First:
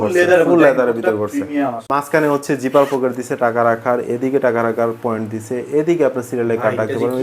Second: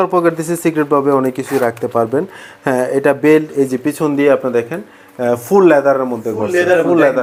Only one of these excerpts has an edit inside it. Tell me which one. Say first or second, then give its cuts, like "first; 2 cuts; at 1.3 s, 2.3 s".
first; 1 cut; at 1.8 s